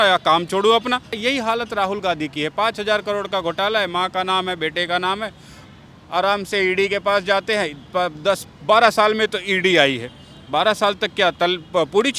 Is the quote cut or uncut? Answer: cut